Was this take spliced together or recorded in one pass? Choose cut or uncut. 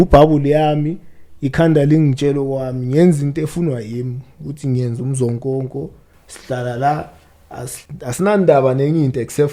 uncut